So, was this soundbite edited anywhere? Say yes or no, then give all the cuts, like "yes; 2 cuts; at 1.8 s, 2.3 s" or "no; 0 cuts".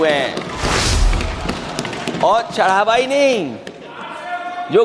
no; 0 cuts